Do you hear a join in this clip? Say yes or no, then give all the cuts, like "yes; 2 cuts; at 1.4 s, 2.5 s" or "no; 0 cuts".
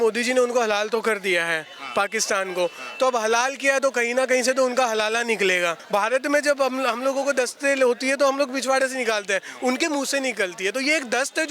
yes; 1 cut; at 5.8 s